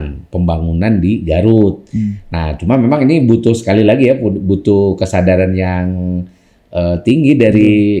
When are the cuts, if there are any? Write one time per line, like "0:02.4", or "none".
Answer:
none